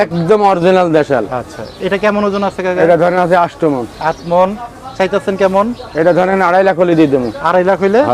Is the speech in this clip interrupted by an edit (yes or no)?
no